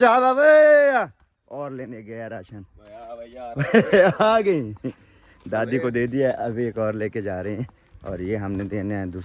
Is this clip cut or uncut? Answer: uncut